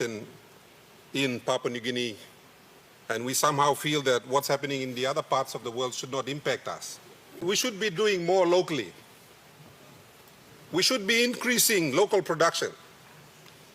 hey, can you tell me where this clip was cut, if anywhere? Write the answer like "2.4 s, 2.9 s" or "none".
7.3 s